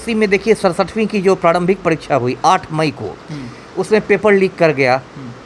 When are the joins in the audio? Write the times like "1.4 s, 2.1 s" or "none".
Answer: none